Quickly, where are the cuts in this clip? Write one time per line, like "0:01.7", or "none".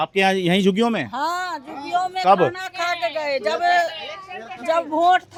none